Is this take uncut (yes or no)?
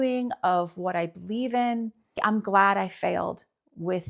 no